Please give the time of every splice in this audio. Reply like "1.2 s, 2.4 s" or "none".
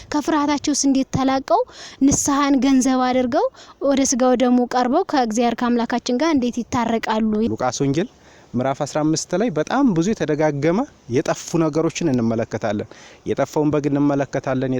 7.5 s